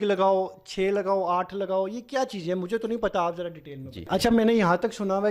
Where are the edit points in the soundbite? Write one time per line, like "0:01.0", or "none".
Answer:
0:04.1

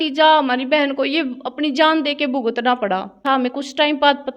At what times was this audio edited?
0:03.2

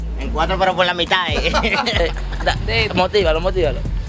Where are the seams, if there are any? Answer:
0:02.0

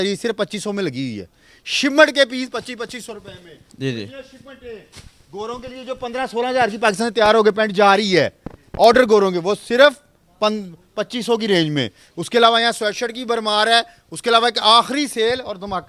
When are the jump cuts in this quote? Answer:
none

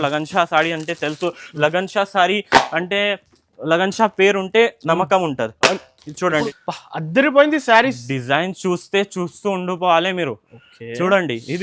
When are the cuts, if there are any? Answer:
0:06.4

